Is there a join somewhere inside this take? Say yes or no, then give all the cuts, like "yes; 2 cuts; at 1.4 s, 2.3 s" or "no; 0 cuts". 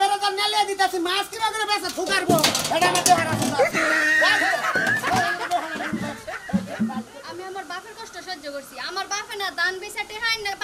yes; 1 cut; at 7.2 s